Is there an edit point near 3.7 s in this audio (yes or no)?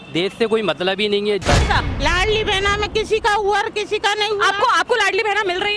no